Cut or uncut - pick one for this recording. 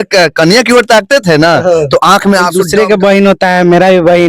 cut